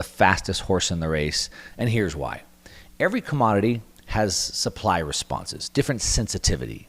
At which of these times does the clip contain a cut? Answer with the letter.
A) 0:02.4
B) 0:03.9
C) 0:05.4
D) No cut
D